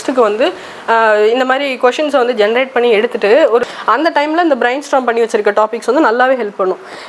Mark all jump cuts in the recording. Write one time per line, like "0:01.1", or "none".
0:03.6